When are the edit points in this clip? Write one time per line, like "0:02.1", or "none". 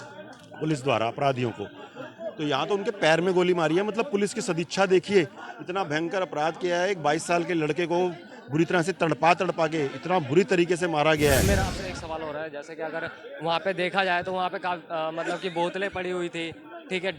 0:11.6